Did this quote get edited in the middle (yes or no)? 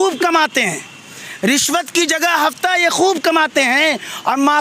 no